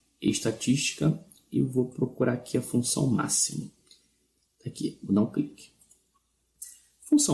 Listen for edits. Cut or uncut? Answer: cut